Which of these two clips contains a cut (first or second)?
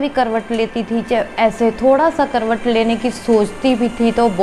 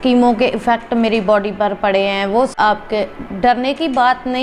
second